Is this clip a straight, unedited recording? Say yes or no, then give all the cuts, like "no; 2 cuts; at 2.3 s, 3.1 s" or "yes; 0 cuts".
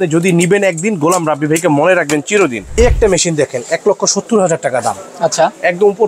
no; 1 cut; at 2.7 s